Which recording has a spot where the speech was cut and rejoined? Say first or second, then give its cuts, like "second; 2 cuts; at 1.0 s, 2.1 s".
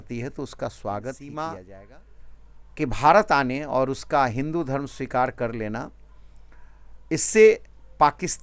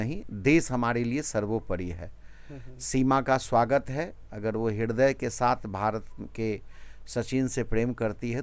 first; 1 cut; at 1.6 s